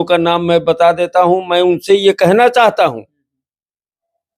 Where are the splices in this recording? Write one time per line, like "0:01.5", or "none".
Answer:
none